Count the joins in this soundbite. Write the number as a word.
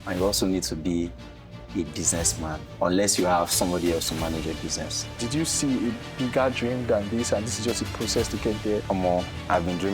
one